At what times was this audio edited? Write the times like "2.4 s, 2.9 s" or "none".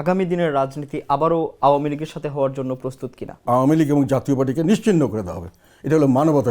3.4 s